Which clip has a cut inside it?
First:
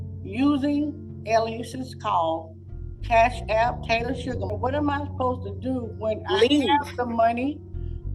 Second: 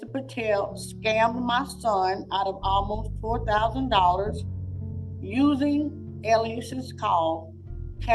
first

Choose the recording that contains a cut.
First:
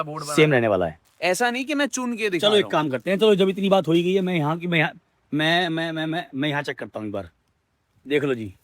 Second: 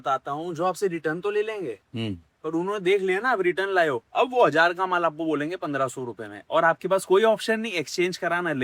first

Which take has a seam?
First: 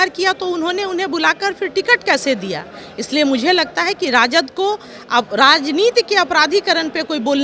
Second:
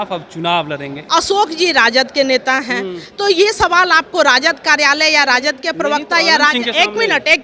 second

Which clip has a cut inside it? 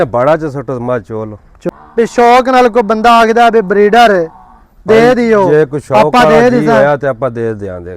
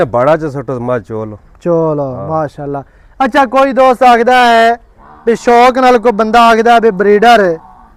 first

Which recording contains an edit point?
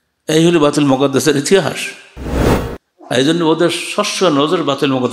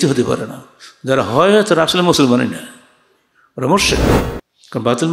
second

